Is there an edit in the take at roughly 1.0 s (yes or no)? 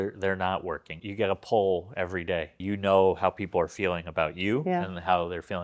yes